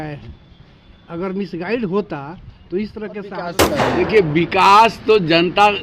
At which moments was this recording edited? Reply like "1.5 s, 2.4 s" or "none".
3.6 s